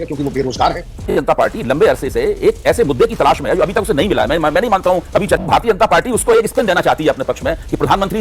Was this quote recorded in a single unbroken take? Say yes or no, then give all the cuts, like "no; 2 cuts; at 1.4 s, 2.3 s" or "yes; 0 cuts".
no; 2 cuts; at 1.1 s, 5.4 s